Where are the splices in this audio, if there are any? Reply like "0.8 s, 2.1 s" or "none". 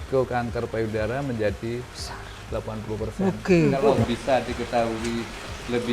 3.8 s